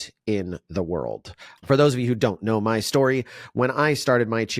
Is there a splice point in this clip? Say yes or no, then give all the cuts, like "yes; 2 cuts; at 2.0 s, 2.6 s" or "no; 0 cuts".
yes; 1 cut; at 1.5 s